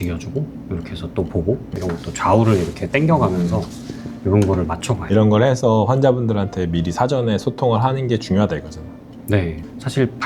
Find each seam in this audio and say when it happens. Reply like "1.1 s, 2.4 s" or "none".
1.7 s, 5.0 s